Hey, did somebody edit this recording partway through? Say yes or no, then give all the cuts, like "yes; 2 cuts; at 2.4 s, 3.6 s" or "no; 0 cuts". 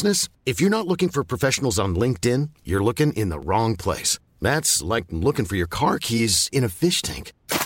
no; 0 cuts